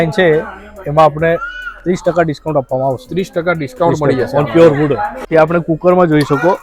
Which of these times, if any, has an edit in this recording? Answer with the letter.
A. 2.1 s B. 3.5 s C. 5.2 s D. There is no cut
C